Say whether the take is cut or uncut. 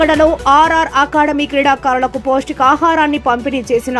uncut